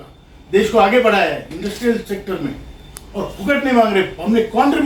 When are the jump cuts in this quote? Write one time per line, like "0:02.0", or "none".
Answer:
none